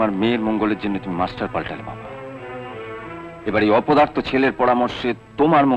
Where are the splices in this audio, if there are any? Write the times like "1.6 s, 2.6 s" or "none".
none